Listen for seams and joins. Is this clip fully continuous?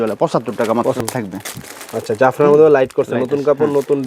no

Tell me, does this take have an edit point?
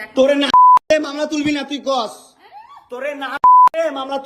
no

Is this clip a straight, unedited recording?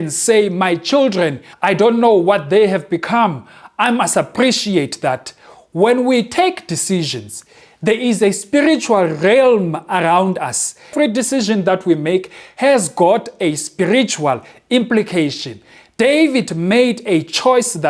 no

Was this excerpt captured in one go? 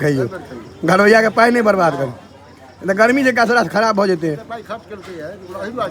yes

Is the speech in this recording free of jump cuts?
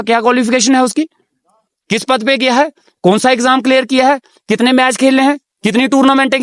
yes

